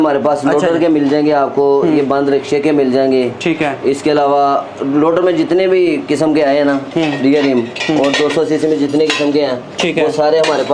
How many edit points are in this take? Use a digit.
0